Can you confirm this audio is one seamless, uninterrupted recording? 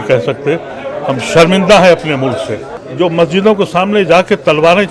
no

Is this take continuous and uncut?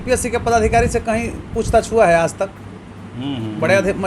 yes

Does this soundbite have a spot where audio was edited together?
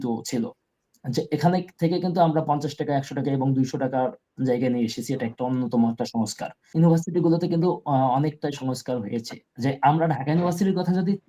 yes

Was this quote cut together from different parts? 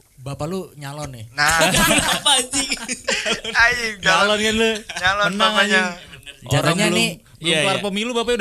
no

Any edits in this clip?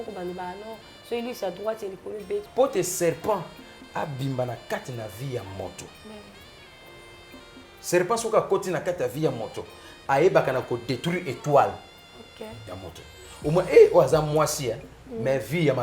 yes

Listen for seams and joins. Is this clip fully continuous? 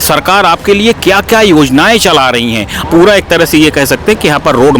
no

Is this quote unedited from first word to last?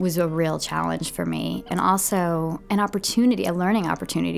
no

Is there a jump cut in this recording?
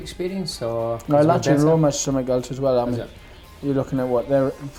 no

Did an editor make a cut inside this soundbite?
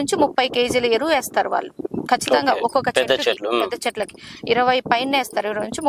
no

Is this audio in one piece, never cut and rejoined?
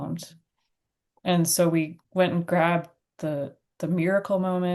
no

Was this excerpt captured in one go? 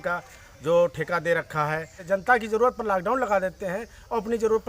no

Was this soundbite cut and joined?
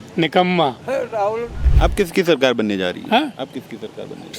yes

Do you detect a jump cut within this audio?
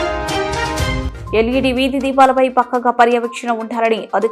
yes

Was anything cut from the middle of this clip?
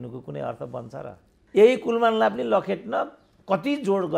yes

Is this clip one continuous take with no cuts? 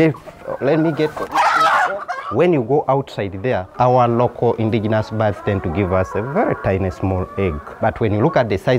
no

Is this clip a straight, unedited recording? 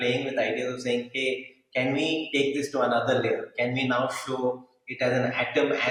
yes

